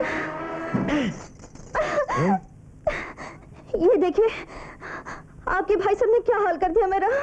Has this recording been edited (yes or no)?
no